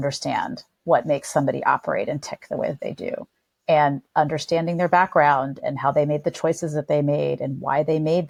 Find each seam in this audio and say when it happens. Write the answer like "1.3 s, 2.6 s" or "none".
none